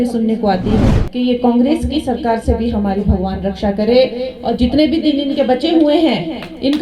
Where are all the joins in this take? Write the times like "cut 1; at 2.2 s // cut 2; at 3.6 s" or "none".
cut 1; at 1.0 s